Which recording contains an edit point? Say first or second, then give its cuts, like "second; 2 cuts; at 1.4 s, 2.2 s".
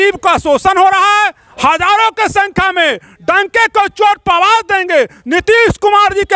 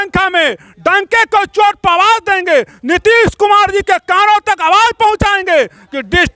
first; 1 cut; at 1.4 s